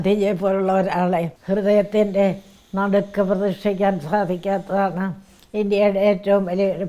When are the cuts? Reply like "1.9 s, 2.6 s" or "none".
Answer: 1.4 s